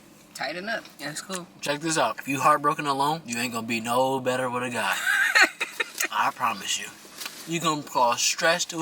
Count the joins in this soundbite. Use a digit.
3